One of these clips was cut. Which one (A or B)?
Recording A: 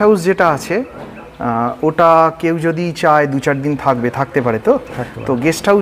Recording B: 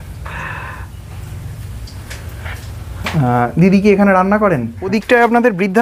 B